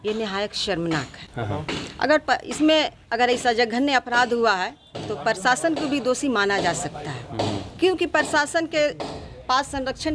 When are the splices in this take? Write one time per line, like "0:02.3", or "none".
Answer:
none

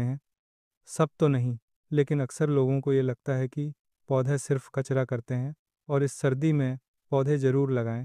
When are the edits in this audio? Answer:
0:05.7

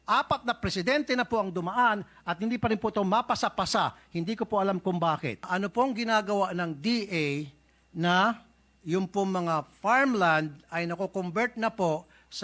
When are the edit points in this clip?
0:05.5

